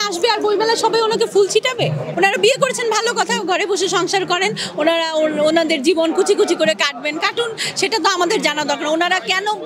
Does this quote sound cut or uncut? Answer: cut